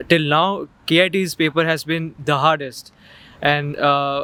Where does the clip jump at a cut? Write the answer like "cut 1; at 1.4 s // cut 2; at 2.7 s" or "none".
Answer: none